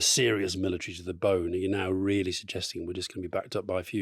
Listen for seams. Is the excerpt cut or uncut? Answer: uncut